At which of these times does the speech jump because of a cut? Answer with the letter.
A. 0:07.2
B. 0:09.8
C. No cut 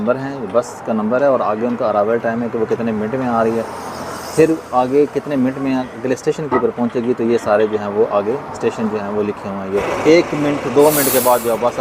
B